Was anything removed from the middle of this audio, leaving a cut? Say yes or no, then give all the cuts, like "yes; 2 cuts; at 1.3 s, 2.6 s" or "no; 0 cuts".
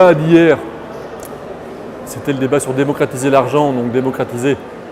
no; 0 cuts